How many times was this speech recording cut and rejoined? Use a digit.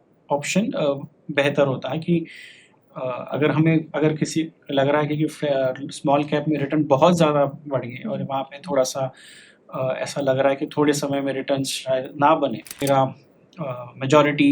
1